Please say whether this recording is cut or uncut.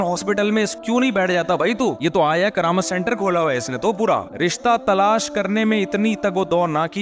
cut